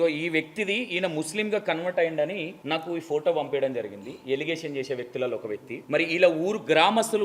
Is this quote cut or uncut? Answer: cut